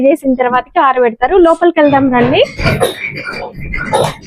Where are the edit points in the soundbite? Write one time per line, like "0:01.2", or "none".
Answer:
0:02.6

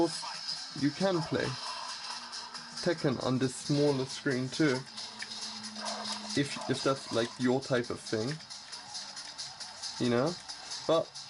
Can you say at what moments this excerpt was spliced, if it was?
none

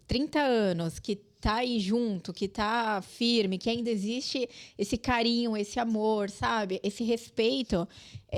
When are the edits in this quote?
none

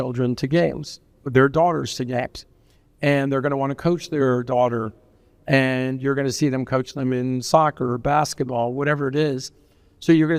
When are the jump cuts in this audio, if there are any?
none

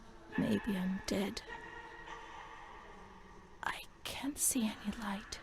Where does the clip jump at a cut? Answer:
0:01.5
0:03.5

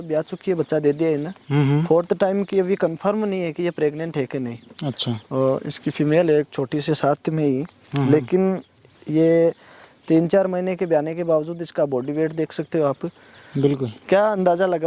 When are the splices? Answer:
none

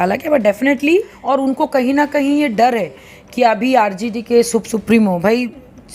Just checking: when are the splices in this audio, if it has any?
0:01.2

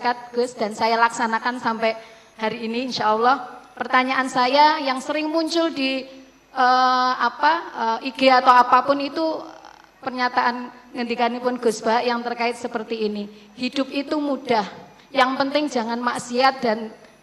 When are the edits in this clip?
none

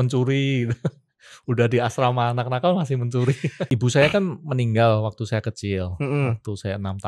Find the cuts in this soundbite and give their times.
0:03.7

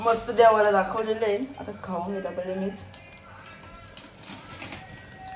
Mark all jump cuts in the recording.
none

